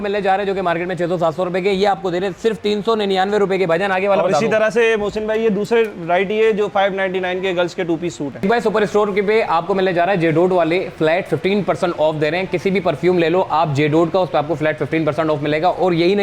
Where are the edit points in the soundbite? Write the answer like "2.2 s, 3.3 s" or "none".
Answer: none

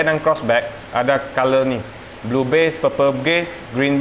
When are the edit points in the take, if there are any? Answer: none

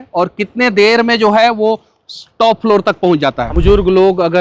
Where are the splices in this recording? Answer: 3.5 s

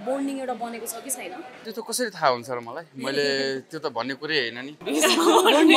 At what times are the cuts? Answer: 1.5 s, 4.8 s

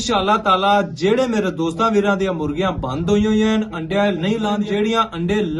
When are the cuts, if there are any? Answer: 4.6 s

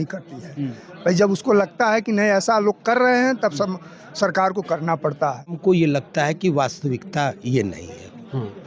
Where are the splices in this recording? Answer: 5.6 s

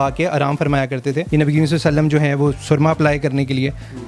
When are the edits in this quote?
1.2 s

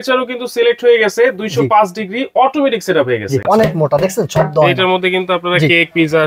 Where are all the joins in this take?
3.4 s

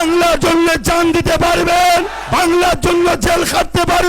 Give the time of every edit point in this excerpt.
2.2 s

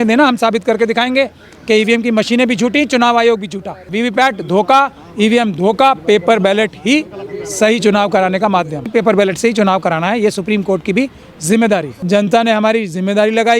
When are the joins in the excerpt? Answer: 3.9 s, 8.8 s, 11.9 s

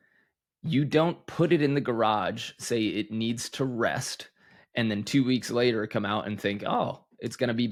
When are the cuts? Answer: none

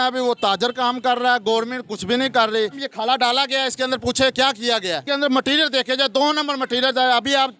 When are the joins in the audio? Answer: 2.8 s, 5.0 s

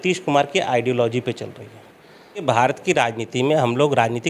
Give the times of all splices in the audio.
2.4 s

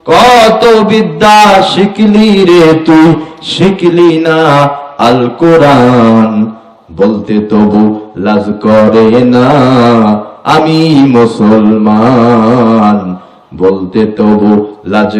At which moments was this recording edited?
none

